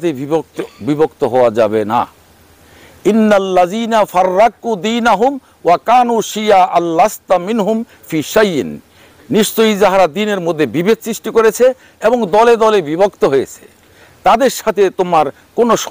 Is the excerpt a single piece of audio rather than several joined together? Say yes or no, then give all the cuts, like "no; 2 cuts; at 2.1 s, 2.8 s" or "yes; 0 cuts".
yes; 0 cuts